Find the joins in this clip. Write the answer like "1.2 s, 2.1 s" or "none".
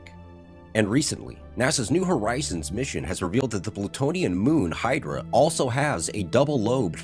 2.3 s